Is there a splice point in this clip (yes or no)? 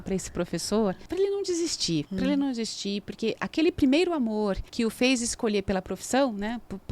yes